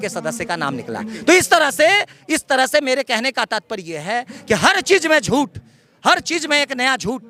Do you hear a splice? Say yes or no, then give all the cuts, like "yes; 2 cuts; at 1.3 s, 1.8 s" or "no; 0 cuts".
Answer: no; 0 cuts